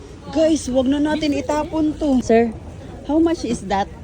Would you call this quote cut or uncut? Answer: cut